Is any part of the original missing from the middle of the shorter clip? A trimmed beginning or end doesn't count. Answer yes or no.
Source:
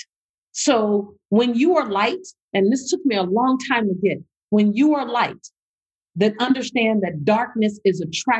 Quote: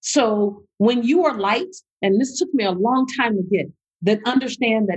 yes